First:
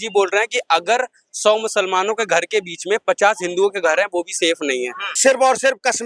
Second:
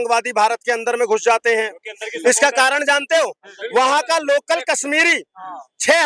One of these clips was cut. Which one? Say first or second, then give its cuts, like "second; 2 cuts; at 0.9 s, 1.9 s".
first; 1 cut; at 5.1 s